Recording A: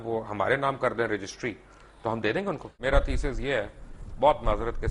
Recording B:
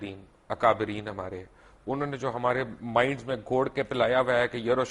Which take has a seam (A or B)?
A